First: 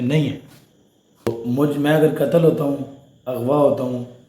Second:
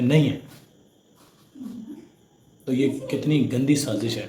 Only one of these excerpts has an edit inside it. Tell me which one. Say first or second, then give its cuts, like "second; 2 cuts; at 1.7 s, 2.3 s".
first; 1 cut; at 1.3 s